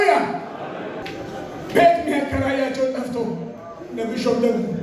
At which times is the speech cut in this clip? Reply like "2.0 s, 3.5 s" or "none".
1.0 s